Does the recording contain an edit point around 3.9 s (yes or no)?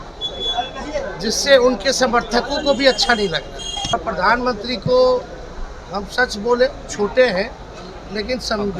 yes